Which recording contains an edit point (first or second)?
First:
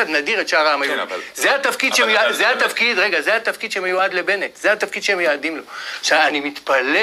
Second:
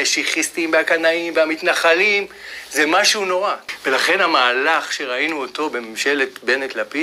second